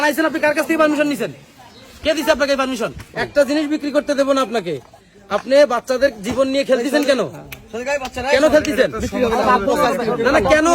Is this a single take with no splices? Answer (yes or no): no